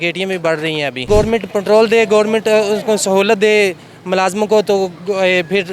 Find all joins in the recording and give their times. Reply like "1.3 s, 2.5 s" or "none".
1.1 s